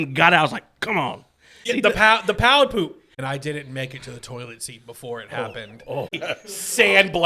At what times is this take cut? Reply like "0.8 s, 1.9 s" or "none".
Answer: 1.7 s, 3.1 s, 6.1 s